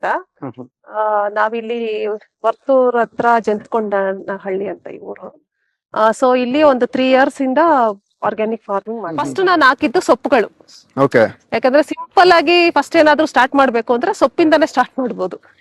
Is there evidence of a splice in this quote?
yes; 1 cut; at 9.2 s

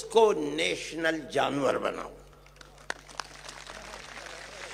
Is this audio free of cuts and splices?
yes; 0 cuts

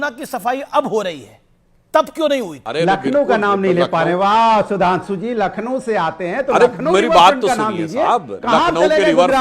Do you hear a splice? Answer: yes; 1 cut; at 2.6 s

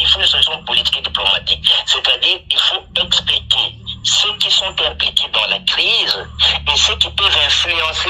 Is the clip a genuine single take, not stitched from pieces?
yes; 0 cuts

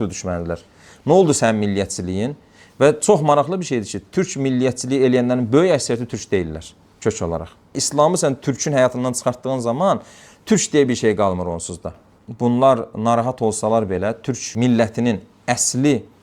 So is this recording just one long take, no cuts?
no; 2 cuts; at 7.6 s, 12.0 s

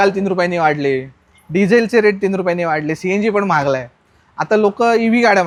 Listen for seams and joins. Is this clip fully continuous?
yes; 0 cuts

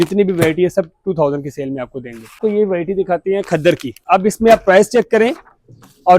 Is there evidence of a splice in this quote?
yes; 2 cuts; at 2.4 s, 3.9 s

